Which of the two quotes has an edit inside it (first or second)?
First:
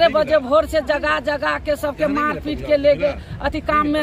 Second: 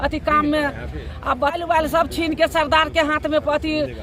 second